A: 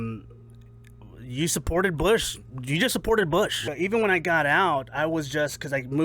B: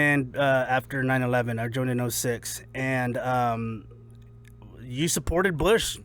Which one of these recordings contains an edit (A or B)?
A